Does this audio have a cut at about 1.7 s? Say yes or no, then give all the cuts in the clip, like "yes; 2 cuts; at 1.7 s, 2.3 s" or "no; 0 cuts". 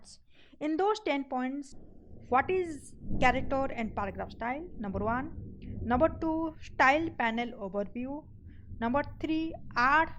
yes; 1 cut; at 1.7 s